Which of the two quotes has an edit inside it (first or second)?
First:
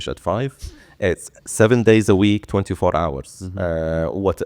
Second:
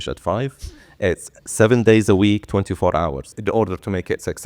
second